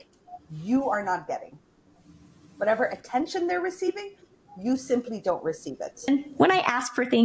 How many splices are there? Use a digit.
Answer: 1